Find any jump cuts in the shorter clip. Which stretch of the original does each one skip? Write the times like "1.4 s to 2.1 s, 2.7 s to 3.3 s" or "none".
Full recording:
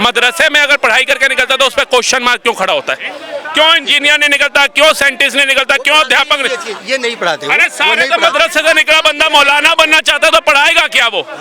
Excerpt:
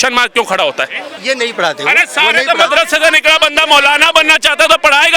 3.2 s to 6.7 s